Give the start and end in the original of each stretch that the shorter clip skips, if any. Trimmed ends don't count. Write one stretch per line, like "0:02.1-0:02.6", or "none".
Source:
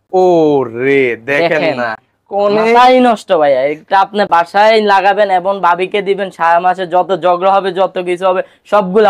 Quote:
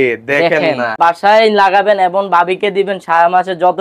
0:02.0-0:04.3